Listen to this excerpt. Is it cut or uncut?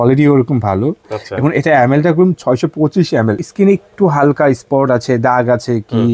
cut